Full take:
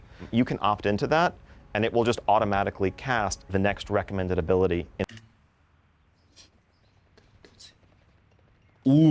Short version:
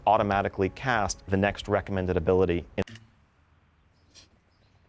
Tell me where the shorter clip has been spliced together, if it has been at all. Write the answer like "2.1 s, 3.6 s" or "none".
none